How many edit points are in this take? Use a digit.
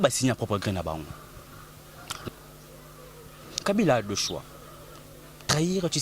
1